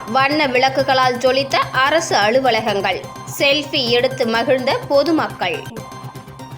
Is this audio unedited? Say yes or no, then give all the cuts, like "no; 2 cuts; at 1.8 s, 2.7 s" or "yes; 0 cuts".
no; 1 cut; at 5.7 s